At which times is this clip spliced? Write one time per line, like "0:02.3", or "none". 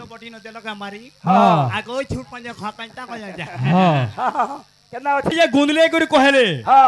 0:05.3